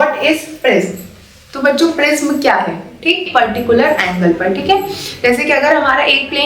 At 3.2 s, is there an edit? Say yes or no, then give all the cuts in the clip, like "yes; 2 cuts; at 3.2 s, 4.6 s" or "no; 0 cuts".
yes; 1 cut; at 3.2 s